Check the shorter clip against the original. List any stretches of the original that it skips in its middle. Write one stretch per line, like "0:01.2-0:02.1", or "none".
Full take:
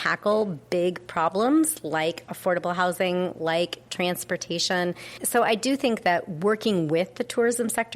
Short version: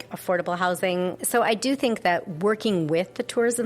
0:03.3-0:05.2